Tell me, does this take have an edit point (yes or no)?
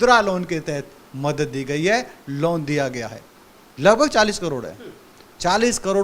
no